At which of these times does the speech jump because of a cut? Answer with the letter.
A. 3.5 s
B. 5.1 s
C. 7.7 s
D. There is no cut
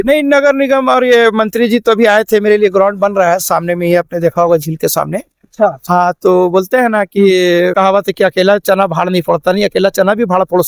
C